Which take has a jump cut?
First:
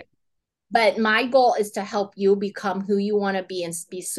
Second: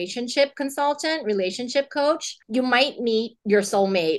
second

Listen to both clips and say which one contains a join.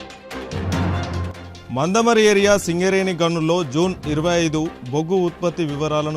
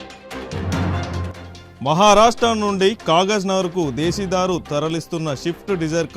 second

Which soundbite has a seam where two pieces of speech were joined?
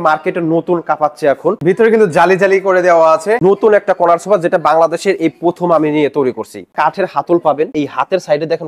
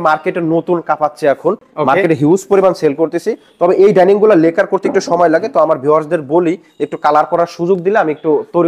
first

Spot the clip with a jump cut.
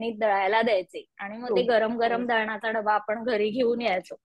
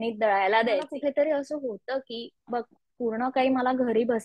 second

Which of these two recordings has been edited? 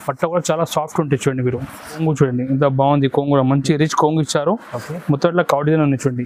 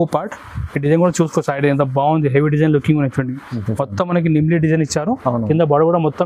first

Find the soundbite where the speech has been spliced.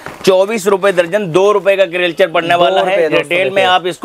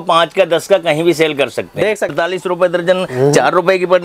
second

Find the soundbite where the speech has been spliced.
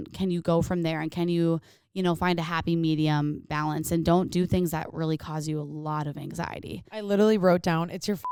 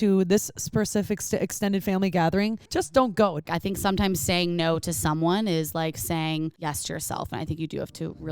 second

